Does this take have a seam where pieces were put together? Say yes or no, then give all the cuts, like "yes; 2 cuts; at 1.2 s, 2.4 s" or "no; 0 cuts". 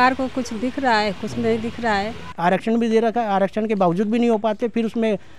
yes; 1 cut; at 2.2 s